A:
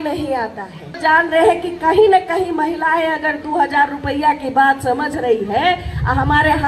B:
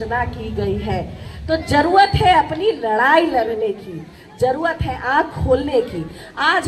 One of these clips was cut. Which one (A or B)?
A